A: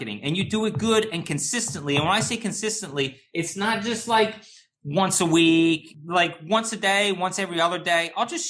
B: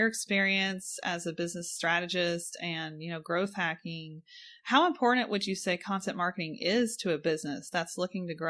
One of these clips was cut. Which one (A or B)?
A